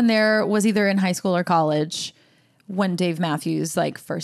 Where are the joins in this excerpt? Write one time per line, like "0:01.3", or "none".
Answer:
none